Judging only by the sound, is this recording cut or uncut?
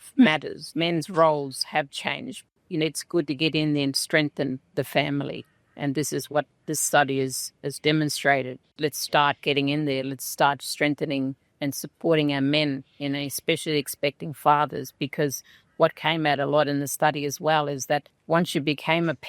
cut